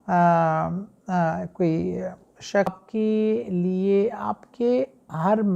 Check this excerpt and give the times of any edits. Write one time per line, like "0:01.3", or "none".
0:02.8